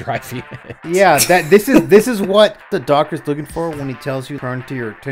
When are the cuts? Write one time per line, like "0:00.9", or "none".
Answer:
0:02.8
0:04.4